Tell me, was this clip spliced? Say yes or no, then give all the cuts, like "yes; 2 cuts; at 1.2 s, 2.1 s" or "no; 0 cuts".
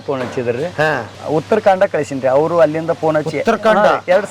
yes; 1 cut; at 1.0 s